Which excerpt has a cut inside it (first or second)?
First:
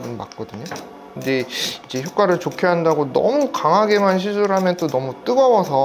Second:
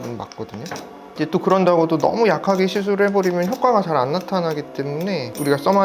second